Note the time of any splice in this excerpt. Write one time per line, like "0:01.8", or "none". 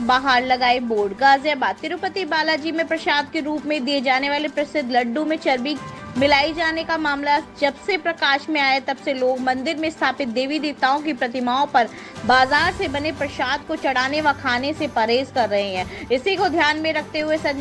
none